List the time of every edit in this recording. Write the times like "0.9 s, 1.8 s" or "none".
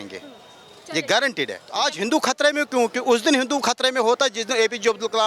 1.6 s